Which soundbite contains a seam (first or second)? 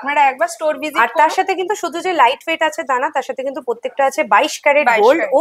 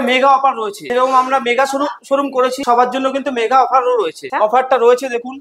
second